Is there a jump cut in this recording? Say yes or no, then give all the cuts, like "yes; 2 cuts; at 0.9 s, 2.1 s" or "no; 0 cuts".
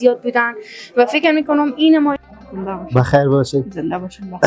yes; 1 cut; at 2.2 s